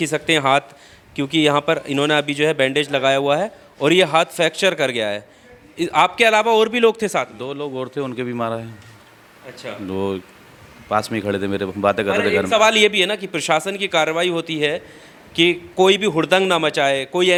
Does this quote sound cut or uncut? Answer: uncut